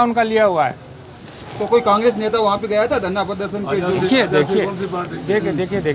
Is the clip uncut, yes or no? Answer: yes